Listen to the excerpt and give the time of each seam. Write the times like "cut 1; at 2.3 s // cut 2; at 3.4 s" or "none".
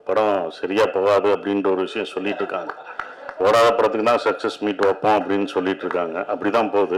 none